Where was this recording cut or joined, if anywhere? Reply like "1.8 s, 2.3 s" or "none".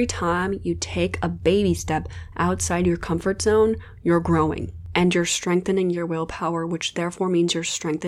none

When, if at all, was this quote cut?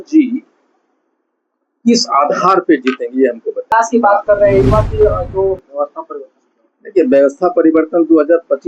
3.7 s

